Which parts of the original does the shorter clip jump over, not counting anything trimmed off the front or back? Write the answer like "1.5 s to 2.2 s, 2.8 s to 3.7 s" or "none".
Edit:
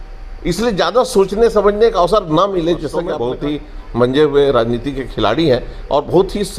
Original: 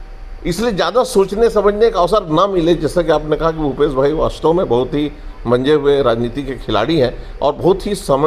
3.2 s to 4.7 s

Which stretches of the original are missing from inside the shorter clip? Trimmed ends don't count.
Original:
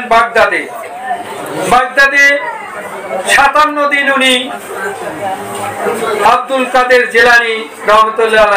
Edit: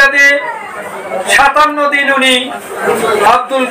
4.8 s to 5.8 s

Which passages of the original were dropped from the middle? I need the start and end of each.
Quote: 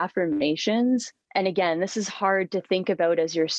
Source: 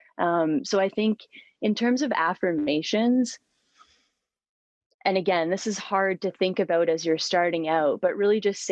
3.4 s to 4.9 s

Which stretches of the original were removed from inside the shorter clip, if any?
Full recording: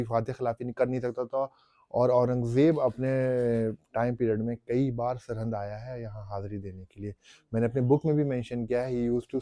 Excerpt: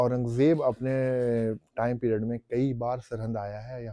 none

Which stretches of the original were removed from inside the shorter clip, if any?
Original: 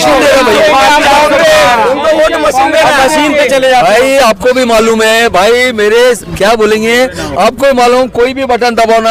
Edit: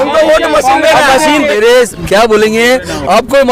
3.4 s to 5.8 s

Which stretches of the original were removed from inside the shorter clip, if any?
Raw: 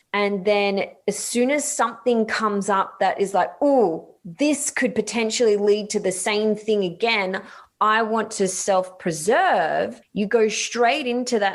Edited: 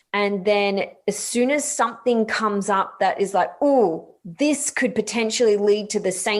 none

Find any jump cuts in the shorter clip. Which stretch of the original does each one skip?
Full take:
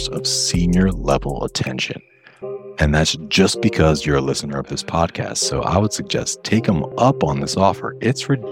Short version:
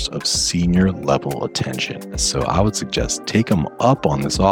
2.2 s to 5.4 s

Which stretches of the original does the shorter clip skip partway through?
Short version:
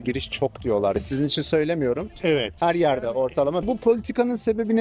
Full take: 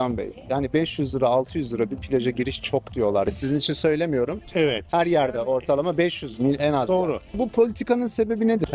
5.9 s to 7.3 s

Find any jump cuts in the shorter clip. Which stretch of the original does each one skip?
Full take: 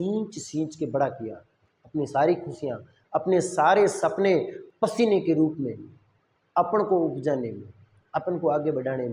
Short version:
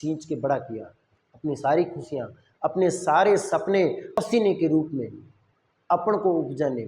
4.6 s to 4.8 s

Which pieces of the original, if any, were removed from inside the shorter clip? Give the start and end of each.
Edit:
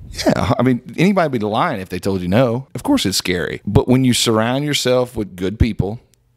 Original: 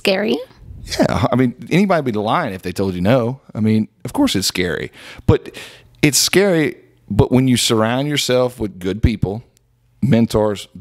3.4 s to 4.0 s, 4.9 s to 7.0 s

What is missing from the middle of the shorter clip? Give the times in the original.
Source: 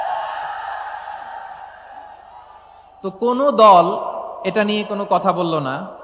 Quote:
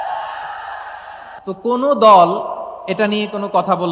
1.2 s to 2.8 s

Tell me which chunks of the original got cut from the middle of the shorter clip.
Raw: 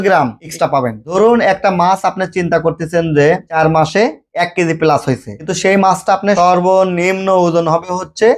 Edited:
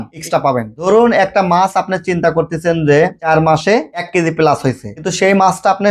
4.2 s to 4.4 s

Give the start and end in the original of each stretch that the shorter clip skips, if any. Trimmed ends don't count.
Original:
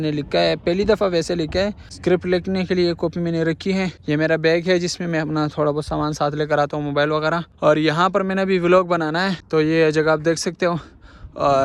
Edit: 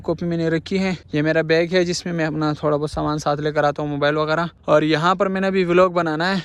none

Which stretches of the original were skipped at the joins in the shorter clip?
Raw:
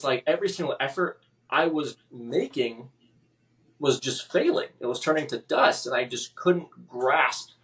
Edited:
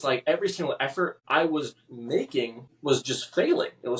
1.2 s to 1.4 s, 2.9 s to 3.6 s

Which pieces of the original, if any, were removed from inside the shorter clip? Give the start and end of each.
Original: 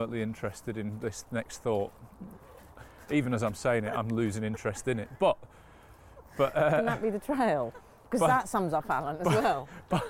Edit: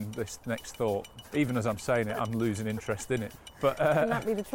2.0 s to 2.9 s, 5.1 s to 6.1 s

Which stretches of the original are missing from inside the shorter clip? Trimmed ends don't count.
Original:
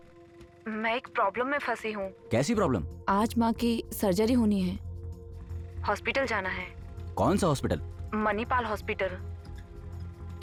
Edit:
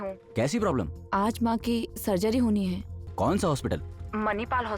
4.9 s to 7.0 s

